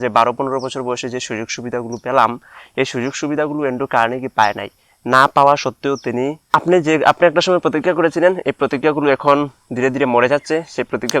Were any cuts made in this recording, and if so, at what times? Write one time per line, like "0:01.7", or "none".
0:06.4